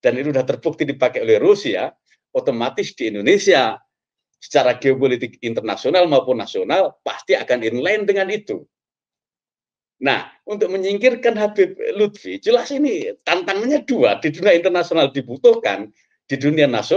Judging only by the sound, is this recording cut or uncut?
uncut